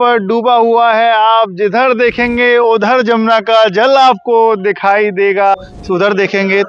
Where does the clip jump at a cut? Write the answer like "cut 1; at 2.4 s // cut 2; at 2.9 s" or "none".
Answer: cut 1; at 5.6 s